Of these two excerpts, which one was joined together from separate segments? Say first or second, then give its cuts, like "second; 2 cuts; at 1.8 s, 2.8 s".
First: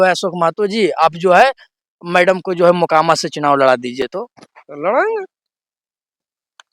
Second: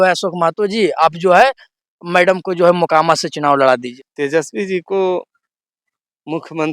second; 1 cut; at 3.9 s